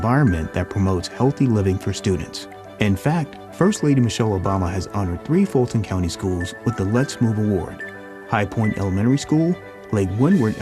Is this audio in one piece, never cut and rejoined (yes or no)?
yes